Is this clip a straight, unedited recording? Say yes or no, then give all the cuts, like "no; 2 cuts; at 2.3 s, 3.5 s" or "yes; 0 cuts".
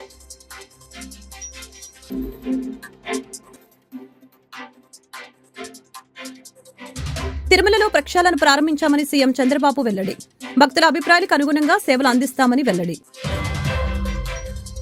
no; 1 cut; at 1.8 s